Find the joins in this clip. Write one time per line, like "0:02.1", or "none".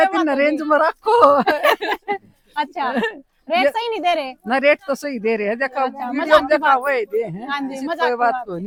none

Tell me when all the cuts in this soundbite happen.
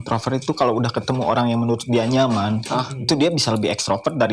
none

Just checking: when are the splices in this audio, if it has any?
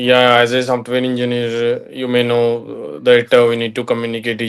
none

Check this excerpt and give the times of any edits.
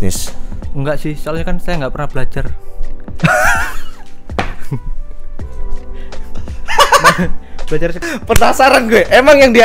0:08.0

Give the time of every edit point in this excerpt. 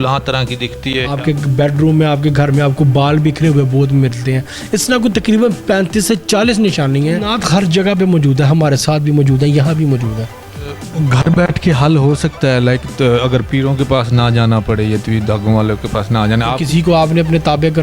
0:01.1
0:07.3
0:10.8
0:16.6

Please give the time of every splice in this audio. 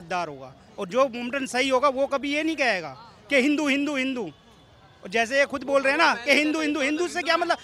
none

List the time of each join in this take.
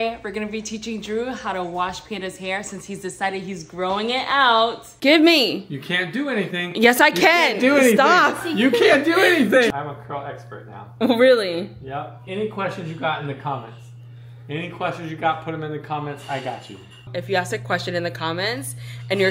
0:04.9
0:09.8
0:12.2
0:17.0

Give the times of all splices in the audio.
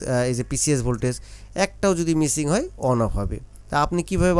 none

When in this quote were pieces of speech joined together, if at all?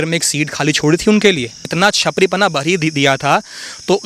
0:01.7

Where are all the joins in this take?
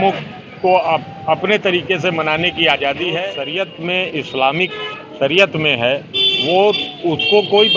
0:03.4

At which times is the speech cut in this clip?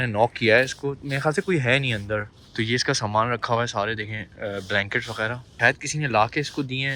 0:02.4
0:05.6

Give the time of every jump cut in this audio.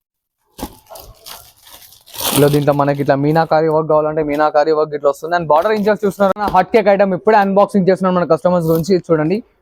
0:06.3

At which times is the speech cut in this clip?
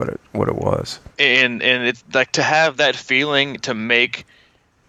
none

